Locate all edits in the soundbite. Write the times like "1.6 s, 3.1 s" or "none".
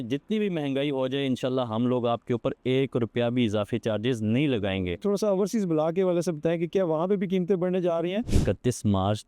5.0 s, 8.3 s